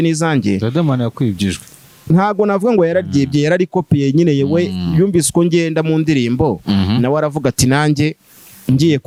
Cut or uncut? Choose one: uncut